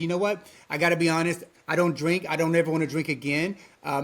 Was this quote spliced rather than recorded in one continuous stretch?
yes; 1 cut; at 1.5 s

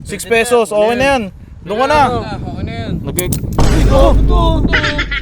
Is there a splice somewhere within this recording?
no; 0 cuts

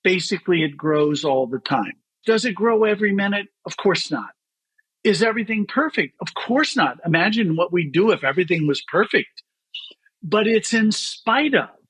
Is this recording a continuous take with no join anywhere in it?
no; 1 cut; at 2.2 s

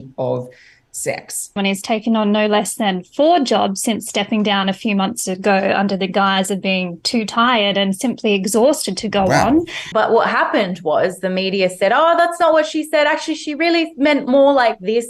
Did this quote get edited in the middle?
yes; 2 cuts; at 1.6 s, 9.8 s

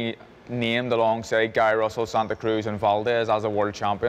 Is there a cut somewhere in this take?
no; 0 cuts

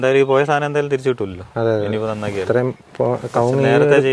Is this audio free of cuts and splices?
yes; 0 cuts

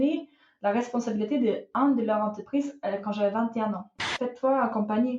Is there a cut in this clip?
yes; 1 cut; at 4.2 s

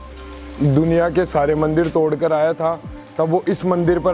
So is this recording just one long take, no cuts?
yes; 0 cuts

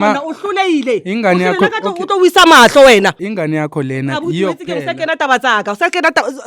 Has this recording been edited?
yes; 1 cut; at 3.2 s

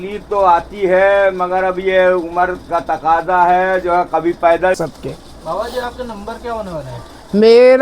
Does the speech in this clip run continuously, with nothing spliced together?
no; 1 cut; at 4.8 s

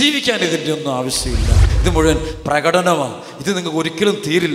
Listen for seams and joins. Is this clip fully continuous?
no; 1 cut; at 1.7 s

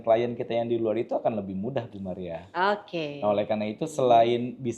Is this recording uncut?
yes; 0 cuts

